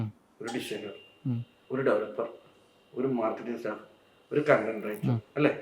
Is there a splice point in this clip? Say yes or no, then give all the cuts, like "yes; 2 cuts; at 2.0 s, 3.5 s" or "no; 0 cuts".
yes; 1 cut; at 1.5 s